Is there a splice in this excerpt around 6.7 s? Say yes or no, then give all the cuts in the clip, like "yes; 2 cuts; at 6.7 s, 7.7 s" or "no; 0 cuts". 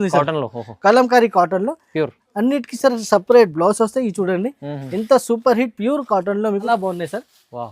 yes; 1 cut; at 6.7 s